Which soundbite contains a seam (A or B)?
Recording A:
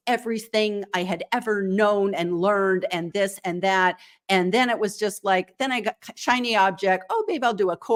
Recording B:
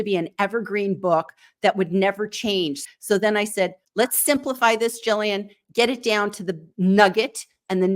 B